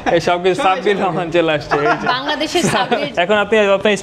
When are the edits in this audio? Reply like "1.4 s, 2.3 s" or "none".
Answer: 3.1 s